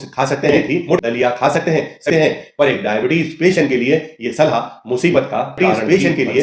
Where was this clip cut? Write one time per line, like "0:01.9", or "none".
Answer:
0:01.0
0:02.1
0:05.6